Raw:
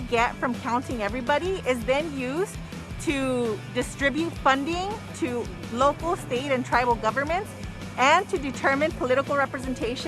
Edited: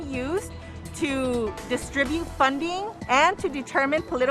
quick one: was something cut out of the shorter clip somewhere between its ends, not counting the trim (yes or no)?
yes